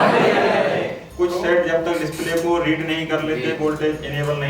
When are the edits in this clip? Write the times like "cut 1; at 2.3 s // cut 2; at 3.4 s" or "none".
cut 1; at 1.0 s